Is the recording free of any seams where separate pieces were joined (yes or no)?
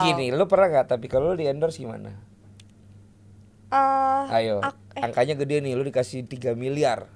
yes